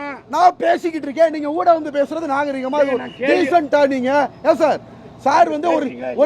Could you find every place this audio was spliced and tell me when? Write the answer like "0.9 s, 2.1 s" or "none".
none